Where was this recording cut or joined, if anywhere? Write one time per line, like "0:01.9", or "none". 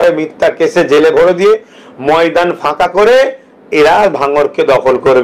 none